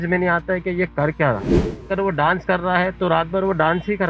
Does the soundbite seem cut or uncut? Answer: cut